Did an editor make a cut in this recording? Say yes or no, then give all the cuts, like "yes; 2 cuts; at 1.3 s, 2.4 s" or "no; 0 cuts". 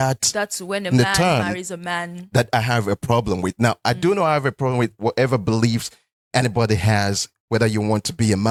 no; 0 cuts